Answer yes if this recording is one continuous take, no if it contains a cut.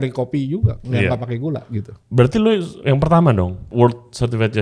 no